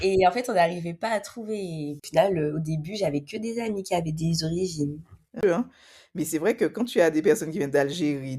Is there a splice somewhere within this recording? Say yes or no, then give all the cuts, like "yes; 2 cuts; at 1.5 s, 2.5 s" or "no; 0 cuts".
yes; 2 cuts; at 2.1 s, 5.4 s